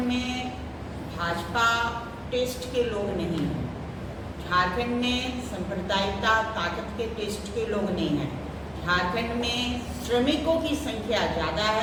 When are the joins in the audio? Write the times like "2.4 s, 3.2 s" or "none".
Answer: none